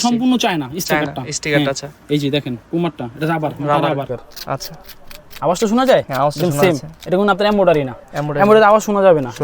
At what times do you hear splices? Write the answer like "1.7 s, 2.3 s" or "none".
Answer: 4.2 s